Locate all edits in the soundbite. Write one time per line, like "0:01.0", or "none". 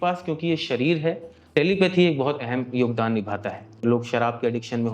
0:01.5
0:03.8